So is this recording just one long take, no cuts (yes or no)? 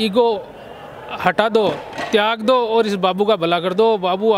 yes